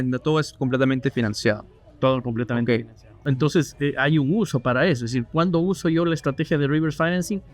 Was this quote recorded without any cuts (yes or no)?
no